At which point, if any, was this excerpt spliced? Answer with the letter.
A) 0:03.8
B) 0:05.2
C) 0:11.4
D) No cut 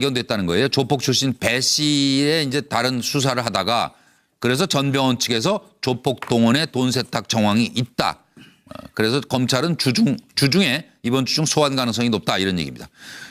C